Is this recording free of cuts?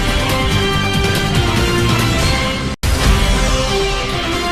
yes; 0 cuts

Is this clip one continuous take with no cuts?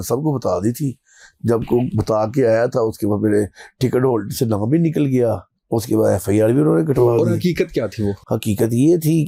yes; 0 cuts

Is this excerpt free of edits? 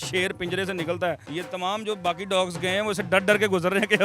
no; 1 cut; at 1.3 s

